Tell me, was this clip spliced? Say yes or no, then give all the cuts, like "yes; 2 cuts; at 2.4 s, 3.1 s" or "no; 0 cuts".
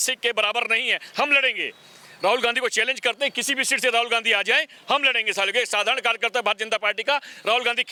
no; 0 cuts